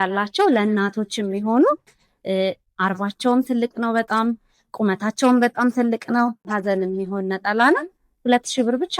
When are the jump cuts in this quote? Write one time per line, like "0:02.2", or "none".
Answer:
0:06.5

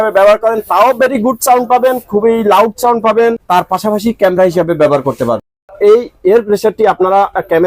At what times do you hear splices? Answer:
0:03.4
0:05.7

